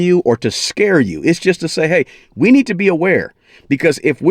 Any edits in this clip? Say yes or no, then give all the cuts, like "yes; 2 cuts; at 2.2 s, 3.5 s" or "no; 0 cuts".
no; 0 cuts